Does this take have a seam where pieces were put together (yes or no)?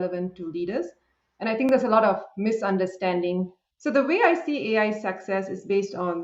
yes